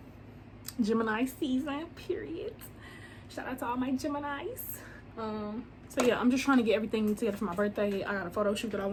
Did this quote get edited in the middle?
no; 0 cuts

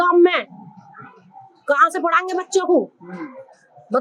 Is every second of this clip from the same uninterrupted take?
yes; 0 cuts

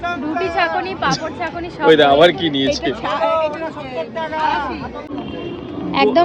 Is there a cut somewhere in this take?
yes; 1 cut; at 5.1 s

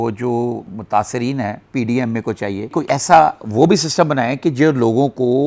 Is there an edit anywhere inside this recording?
no; 0 cuts

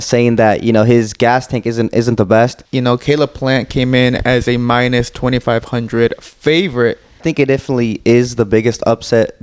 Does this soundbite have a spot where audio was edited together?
yes; 2 cuts; at 2.6 s, 7.2 s

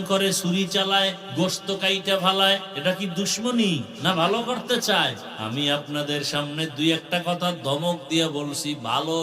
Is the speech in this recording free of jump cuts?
no; 4 cuts; at 1.2 s, 2.7 s, 3.9 s, 5.3 s

